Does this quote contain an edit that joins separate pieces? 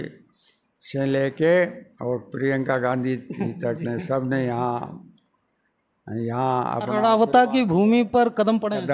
no; 0 cuts

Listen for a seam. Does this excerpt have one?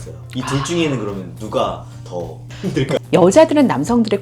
yes; 1 cut; at 3.0 s

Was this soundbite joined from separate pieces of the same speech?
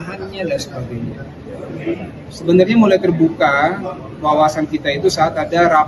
no; 0 cuts

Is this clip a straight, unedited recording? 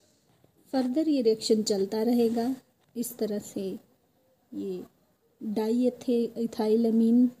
no; 1 cut; at 6.3 s

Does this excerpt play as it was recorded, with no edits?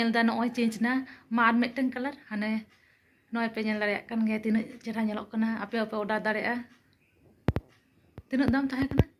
yes; 0 cuts

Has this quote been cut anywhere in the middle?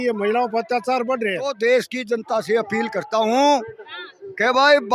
yes; 1 cut; at 1.5 s

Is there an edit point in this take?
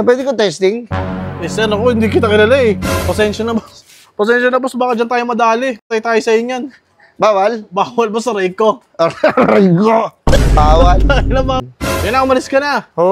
yes; 1 cut; at 11.6 s

